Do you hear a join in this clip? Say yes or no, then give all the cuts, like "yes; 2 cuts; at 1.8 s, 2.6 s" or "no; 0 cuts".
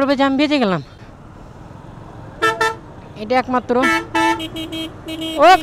yes; 1 cut; at 1.0 s